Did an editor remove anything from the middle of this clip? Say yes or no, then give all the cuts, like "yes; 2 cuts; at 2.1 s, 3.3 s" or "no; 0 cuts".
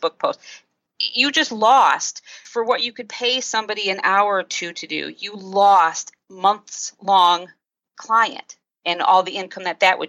yes; 2 cuts; at 2.4 s, 6.3 s